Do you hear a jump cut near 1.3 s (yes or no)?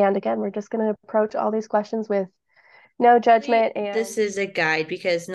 no